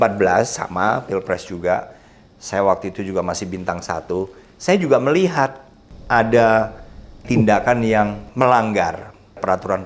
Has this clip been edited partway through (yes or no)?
yes